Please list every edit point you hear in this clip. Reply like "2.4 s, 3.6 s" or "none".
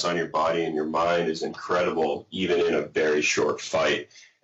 none